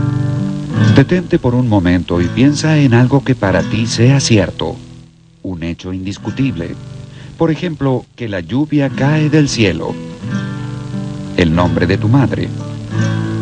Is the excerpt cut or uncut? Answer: uncut